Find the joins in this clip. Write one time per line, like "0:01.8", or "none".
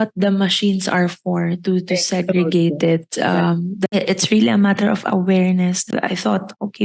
0:04.0
0:05.8

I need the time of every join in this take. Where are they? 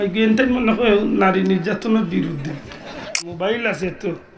0:03.3

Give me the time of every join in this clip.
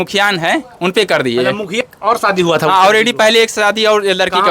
0:01.9

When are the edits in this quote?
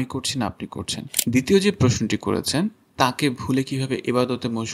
0:01.0

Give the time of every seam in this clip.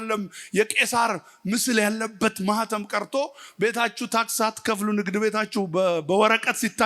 none

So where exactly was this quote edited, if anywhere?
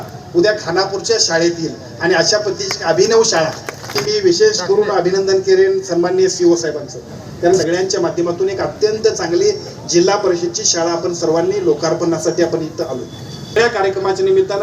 0:04.0
0:07.6
0:13.6

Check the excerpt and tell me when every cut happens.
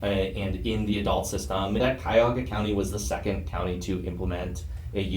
0:01.8

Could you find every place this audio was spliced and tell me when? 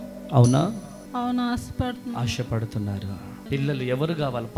0:00.9
0:03.4

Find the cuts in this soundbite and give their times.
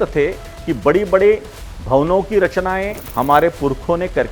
0:03.0

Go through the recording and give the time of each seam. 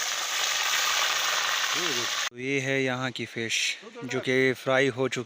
0:02.3

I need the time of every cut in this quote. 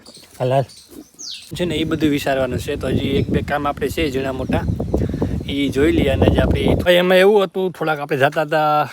0:01.6
0:06.8

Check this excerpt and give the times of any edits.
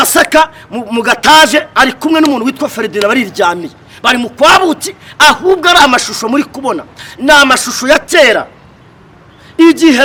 none

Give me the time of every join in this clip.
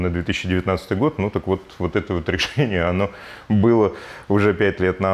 none

